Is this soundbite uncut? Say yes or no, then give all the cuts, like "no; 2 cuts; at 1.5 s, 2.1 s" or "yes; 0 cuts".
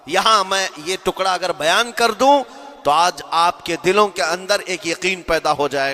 yes; 0 cuts